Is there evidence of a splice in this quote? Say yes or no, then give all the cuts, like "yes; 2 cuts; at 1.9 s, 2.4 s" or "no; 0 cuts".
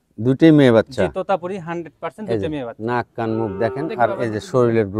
no; 0 cuts